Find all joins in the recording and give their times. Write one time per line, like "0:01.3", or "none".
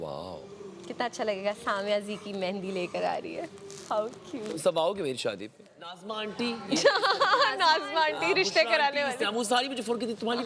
0:06.0